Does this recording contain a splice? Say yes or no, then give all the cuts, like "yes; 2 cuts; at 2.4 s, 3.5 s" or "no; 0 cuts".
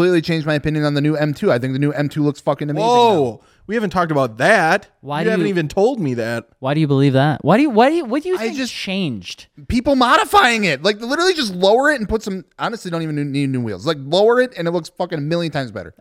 no; 0 cuts